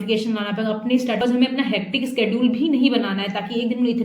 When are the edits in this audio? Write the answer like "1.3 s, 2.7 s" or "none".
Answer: 1.2 s